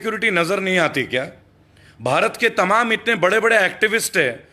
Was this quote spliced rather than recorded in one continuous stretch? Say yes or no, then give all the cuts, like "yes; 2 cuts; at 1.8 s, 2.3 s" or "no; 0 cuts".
no; 0 cuts